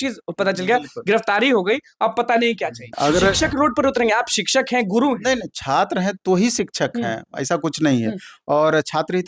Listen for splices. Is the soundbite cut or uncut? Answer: cut